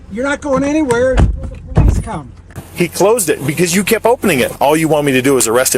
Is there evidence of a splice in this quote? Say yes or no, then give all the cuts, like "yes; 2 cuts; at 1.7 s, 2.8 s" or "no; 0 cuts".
yes; 2 cuts; at 2.6 s, 4.6 s